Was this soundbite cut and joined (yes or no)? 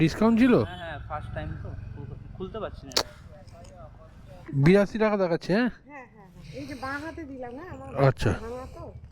yes